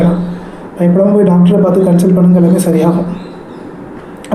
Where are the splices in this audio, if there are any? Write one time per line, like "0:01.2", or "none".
none